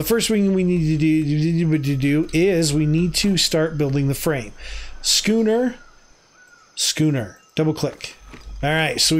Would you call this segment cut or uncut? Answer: uncut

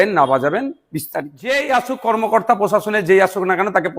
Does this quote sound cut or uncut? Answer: cut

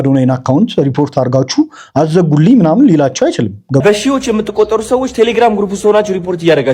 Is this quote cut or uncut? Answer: cut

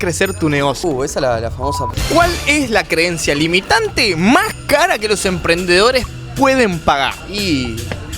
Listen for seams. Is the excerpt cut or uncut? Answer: cut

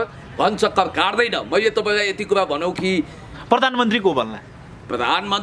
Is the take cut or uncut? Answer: uncut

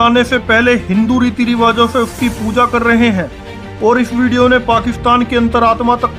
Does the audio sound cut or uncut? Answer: uncut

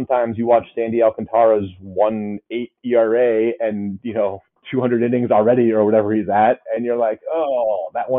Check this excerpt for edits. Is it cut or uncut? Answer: uncut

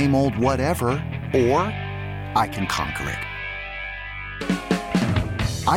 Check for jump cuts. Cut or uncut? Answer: uncut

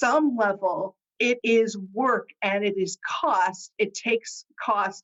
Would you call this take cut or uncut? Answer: uncut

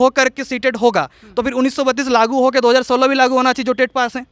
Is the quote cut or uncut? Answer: uncut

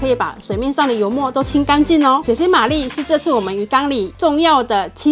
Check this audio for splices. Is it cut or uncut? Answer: cut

